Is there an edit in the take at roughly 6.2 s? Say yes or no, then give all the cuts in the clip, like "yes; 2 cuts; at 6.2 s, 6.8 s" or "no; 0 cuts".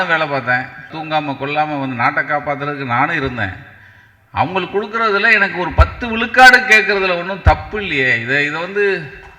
no; 1 cut; at 0.9 s